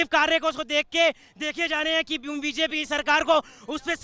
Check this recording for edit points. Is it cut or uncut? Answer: uncut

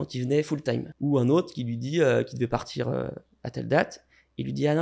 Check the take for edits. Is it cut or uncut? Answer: cut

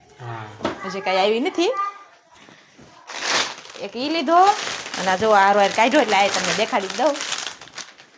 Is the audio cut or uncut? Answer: uncut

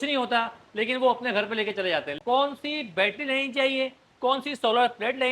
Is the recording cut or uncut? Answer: cut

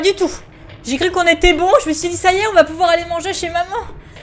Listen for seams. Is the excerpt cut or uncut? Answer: uncut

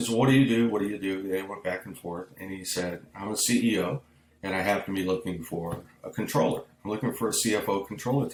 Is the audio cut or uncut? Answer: uncut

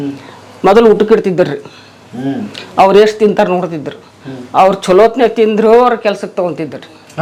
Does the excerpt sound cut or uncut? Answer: uncut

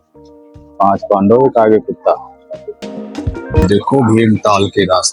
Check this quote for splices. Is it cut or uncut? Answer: cut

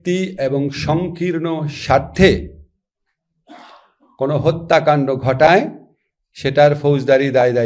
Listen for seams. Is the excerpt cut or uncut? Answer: uncut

